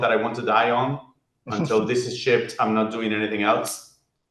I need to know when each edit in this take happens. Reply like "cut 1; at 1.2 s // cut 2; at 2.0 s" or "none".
none